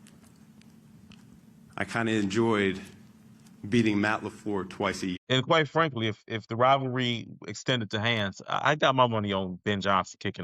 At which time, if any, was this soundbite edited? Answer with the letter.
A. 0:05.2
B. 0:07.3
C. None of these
A